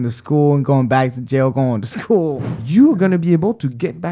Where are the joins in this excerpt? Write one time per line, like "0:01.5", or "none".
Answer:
0:02.4